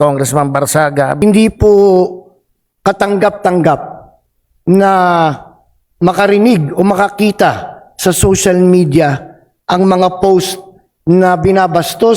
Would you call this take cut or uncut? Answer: cut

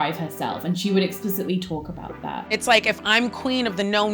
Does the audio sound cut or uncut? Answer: cut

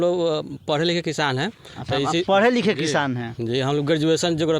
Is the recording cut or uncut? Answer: uncut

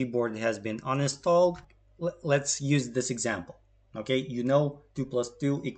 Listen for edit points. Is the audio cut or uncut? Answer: cut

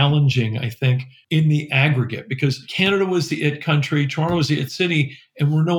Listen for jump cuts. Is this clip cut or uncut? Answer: cut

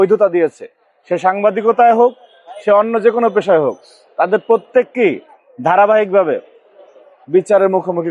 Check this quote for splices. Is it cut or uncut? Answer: uncut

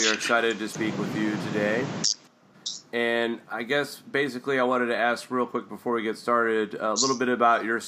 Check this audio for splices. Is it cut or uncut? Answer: uncut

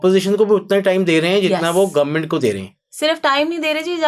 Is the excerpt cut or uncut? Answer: uncut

